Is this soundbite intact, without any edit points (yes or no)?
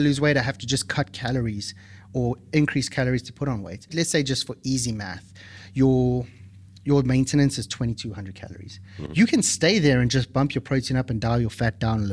no